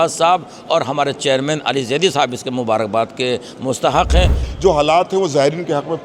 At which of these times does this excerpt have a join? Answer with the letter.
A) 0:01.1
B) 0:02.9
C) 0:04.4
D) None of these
C